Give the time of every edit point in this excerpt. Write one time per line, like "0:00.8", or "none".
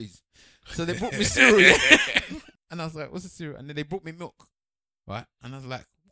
0:02.5